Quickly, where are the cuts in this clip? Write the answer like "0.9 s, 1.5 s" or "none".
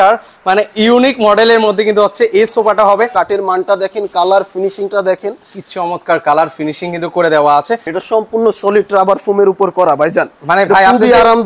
3.1 s, 7.9 s